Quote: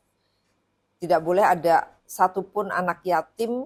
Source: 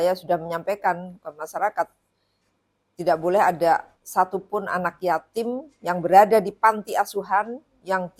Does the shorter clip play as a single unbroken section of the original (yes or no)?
yes